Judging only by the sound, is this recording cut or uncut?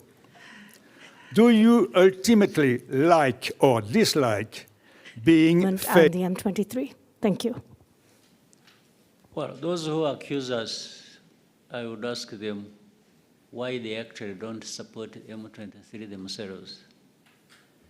cut